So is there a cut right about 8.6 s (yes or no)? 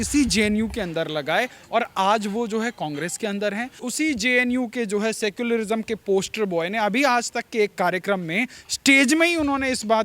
no